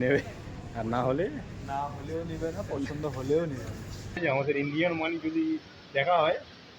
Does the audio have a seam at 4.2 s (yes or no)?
yes